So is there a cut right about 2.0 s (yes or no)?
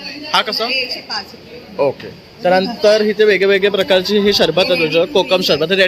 no